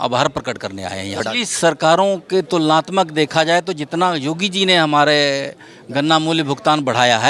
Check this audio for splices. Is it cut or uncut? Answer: cut